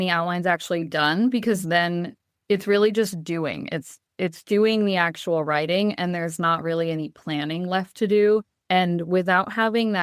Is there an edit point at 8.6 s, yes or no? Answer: yes